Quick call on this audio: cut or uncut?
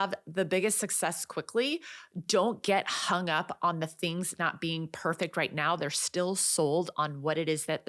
uncut